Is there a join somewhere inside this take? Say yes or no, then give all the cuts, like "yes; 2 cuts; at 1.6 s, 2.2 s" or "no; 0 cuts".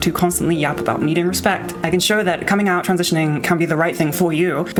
no; 0 cuts